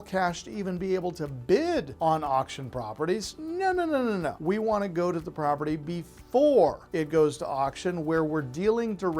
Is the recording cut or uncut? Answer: cut